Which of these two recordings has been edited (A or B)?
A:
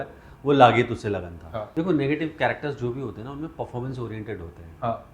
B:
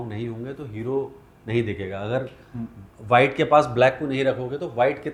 A